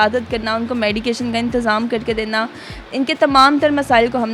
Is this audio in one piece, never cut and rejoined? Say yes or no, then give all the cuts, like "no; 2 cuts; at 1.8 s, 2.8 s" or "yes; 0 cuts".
yes; 0 cuts